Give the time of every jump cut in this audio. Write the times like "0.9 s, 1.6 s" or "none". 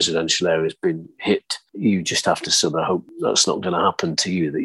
1.7 s, 3.1 s